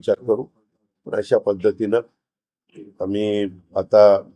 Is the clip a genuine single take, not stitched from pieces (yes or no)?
yes